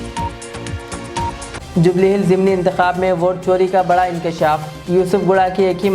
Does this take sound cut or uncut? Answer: uncut